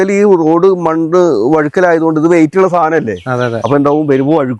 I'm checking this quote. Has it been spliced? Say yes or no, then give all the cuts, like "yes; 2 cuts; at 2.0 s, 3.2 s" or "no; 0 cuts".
no; 0 cuts